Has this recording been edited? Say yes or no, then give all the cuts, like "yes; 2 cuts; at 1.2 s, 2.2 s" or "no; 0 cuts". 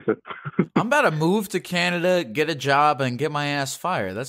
no; 0 cuts